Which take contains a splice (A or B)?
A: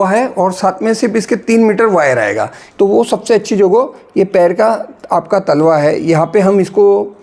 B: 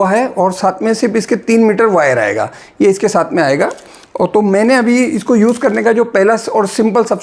A